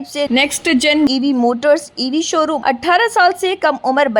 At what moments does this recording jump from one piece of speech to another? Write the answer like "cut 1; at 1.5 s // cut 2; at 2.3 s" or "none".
cut 1; at 2.6 s